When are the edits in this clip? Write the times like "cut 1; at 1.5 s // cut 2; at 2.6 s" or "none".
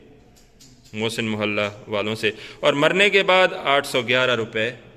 none